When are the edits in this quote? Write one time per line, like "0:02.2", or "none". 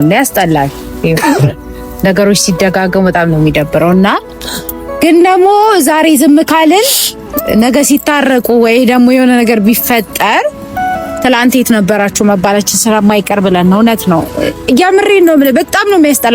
none

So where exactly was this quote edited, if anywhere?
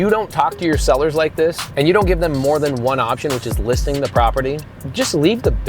0:01.6
0:04.8

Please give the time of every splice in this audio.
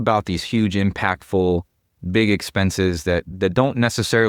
0:03.3

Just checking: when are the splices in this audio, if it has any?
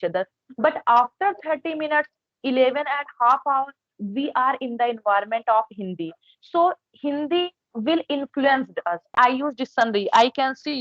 0:09.2

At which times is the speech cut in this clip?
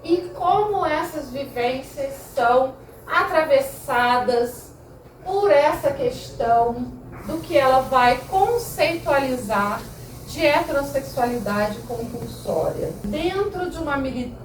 0:13.0

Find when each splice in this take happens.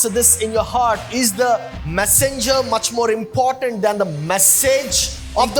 none

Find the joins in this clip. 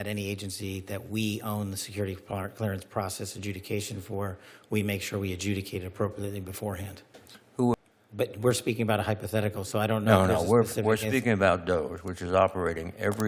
0:07.7

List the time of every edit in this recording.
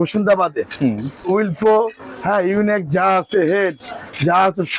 0:01.2

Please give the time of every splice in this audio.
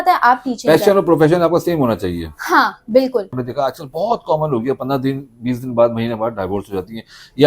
0:03.4

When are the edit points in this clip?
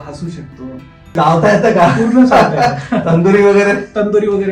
0:01.1

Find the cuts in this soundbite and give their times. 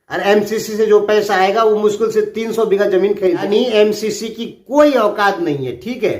0:03.4

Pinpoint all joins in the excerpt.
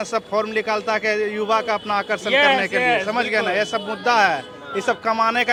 none

